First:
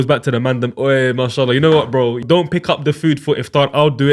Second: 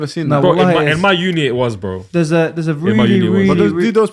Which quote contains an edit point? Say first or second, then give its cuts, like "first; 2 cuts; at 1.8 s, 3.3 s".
first; 1 cut; at 2.2 s